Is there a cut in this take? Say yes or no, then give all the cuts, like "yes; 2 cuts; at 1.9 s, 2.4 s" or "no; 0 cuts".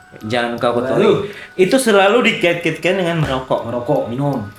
no; 0 cuts